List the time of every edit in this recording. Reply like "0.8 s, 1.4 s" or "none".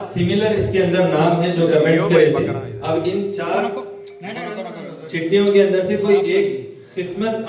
none